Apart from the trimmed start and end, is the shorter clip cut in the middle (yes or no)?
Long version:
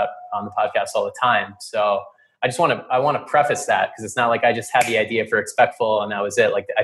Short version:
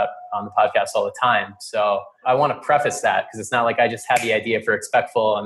yes